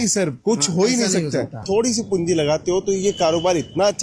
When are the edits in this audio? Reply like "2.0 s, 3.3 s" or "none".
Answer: 1.6 s